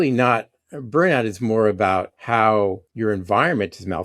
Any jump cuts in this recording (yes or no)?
yes